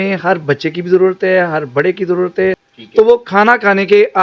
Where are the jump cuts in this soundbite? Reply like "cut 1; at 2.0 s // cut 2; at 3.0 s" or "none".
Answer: cut 1; at 2.7 s

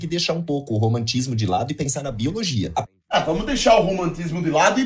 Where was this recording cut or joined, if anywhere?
none

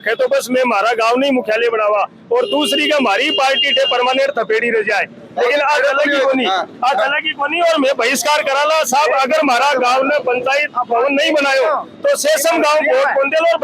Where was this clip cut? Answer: none

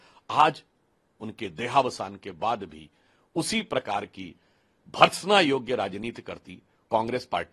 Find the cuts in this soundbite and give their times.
none

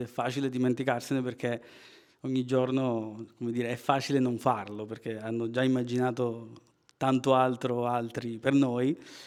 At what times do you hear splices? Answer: none

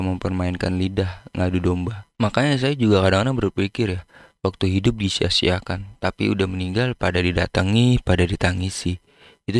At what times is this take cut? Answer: cut 1; at 2.0 s

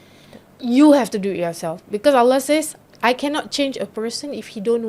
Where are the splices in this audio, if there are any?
cut 1; at 2.7 s

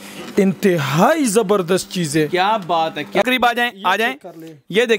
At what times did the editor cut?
cut 1; at 3.2 s

